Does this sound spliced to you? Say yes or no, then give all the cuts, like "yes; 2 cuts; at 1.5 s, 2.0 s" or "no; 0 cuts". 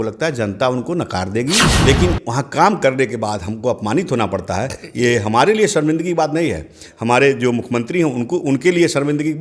yes; 1 cut; at 1.7 s